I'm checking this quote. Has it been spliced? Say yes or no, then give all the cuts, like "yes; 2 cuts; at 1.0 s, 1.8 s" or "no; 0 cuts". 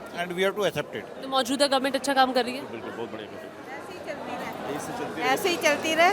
no; 0 cuts